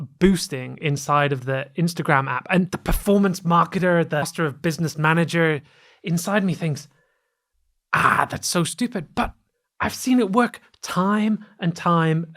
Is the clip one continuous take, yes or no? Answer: no